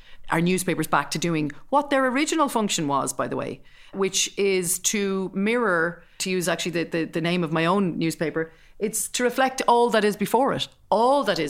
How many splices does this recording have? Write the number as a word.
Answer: two